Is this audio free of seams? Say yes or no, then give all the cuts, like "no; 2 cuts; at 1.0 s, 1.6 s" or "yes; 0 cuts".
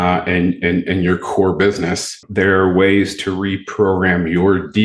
no; 1 cut; at 2.2 s